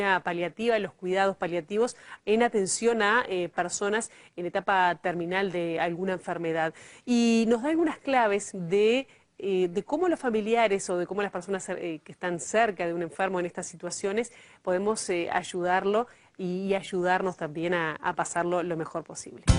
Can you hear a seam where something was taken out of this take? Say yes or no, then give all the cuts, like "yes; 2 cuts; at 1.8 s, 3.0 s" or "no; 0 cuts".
yes; 1 cut; at 1.3 s